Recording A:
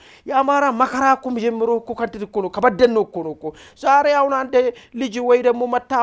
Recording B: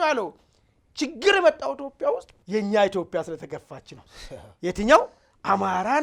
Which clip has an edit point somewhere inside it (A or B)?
B